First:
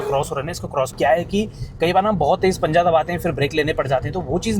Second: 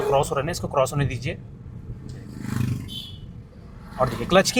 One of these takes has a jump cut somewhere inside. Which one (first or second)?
first